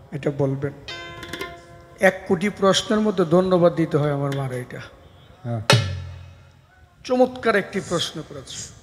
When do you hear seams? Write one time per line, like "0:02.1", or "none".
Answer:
none